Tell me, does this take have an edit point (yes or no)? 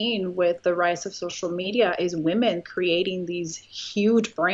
no